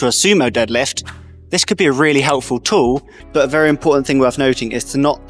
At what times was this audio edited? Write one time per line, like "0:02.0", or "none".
0:03.2

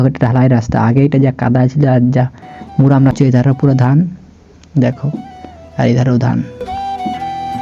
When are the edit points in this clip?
0:03.1

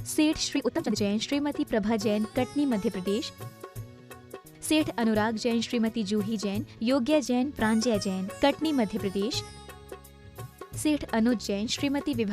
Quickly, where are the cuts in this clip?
0:00.9

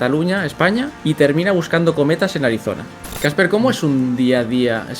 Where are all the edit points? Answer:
0:00.9
0:02.9

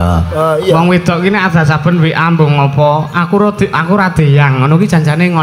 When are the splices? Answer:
none

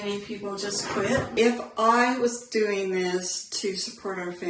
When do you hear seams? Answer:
0:01.3

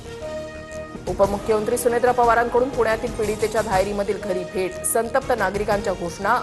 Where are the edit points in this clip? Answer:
0:01.0

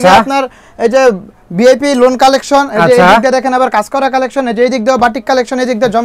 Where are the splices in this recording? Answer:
none

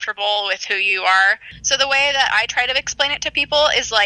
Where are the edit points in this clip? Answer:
0:01.5

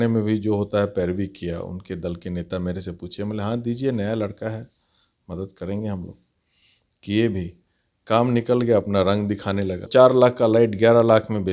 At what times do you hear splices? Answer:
0:09.9

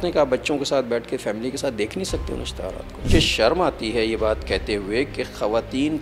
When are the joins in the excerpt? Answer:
none

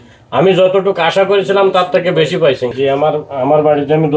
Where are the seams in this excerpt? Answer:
0:02.7

